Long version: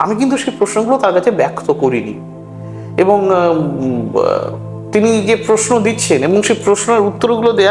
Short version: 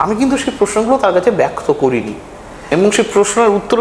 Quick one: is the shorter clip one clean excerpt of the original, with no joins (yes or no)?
no